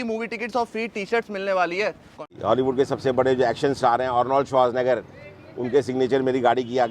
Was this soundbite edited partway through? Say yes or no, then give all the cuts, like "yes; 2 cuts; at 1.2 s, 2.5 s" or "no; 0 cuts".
yes; 1 cut; at 2.3 s